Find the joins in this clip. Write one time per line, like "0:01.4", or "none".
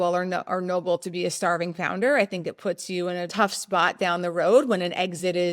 0:03.3